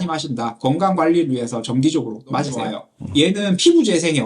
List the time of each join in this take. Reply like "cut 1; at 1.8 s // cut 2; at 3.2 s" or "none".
cut 1; at 2.8 s